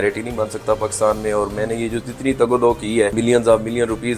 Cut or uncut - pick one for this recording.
cut